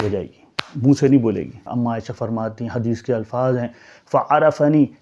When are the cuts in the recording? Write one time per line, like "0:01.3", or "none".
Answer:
0:01.6